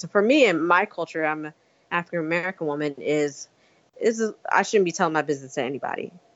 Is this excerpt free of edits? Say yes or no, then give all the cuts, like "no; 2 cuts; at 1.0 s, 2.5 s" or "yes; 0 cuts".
yes; 0 cuts